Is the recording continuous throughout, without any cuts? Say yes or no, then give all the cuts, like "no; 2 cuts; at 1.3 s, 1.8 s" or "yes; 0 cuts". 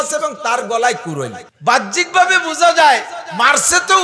no; 1 cut; at 1.4 s